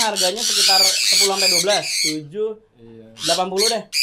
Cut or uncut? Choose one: uncut